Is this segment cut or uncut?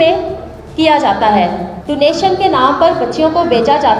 cut